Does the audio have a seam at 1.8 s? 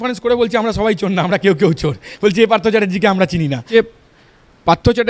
no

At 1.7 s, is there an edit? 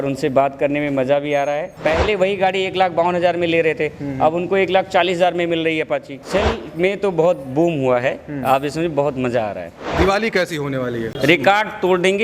yes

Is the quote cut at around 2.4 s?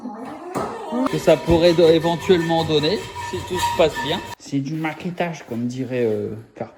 no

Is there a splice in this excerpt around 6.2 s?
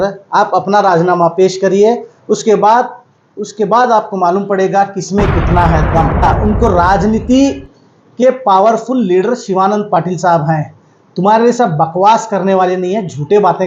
yes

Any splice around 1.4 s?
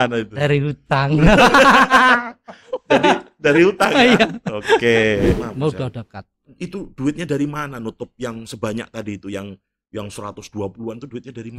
no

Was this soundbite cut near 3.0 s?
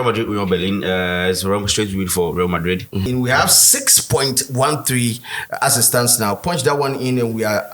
yes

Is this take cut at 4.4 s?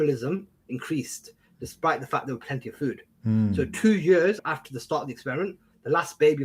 yes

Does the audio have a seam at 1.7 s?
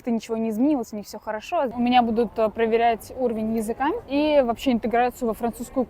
yes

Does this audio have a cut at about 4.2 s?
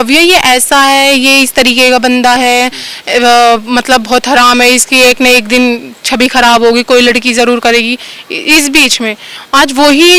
no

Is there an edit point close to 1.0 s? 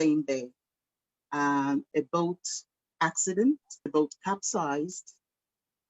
no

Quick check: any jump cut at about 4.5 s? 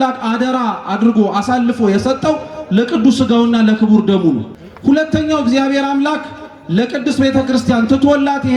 yes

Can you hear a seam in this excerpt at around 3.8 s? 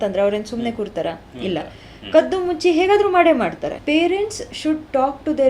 yes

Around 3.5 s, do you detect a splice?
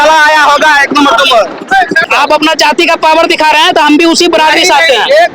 no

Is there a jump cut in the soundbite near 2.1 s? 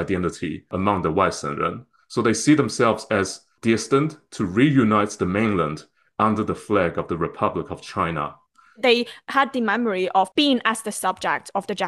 no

